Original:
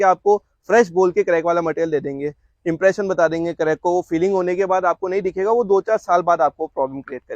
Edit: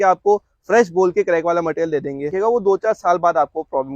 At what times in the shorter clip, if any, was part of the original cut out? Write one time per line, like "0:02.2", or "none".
0:02.3